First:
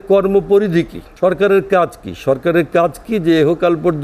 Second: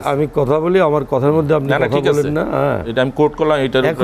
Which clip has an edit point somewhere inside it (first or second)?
first